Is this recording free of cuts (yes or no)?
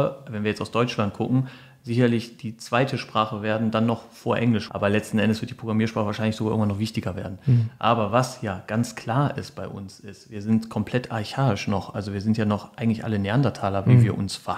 no